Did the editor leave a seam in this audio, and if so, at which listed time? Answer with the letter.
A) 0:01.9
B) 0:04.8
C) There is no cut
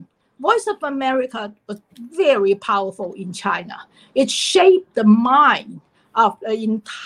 C